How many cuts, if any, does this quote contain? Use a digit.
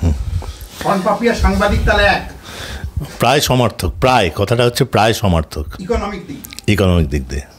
0